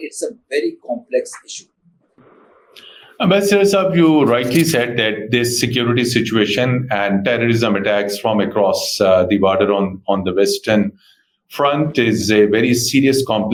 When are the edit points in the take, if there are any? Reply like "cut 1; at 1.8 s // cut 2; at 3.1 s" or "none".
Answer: none